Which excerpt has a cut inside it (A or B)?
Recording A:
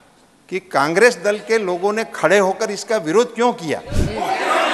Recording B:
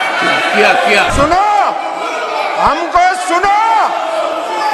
B